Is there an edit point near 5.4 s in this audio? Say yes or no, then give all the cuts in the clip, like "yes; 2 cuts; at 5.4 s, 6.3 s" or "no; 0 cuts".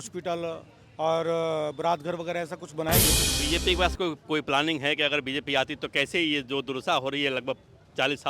no; 1 cut; at 3.3 s